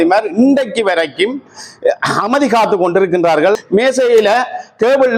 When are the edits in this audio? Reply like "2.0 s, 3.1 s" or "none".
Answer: 3.6 s